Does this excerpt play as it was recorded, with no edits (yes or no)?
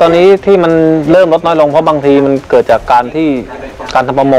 yes